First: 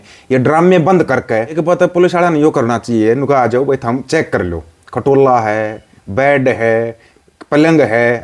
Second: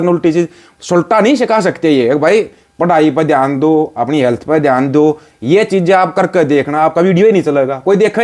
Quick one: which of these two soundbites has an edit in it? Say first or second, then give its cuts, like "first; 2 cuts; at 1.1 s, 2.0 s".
first; 1 cut; at 1.6 s